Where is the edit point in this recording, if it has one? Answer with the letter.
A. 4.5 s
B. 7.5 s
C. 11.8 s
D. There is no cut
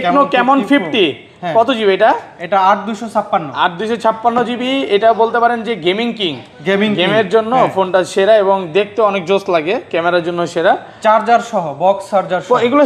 D